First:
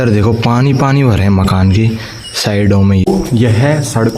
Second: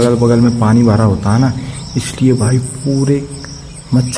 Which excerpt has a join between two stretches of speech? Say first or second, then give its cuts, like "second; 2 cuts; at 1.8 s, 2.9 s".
first; 1 cut; at 3.1 s